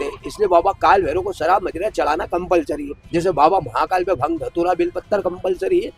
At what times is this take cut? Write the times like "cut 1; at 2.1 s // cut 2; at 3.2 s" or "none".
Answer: cut 1; at 2.9 s